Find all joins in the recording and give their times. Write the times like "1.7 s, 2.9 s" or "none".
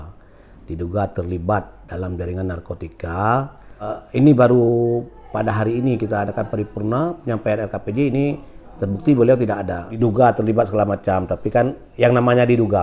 4.0 s, 9.8 s